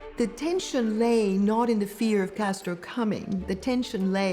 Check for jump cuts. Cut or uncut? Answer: uncut